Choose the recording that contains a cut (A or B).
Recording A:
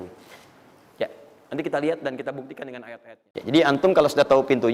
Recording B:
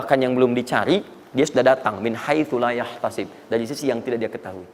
A